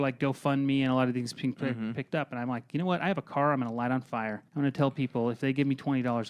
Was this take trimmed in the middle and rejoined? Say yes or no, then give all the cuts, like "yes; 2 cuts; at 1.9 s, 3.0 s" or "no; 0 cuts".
yes; 1 cut; at 4.4 s